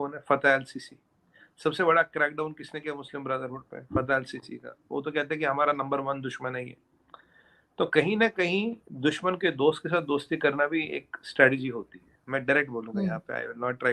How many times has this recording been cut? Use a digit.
0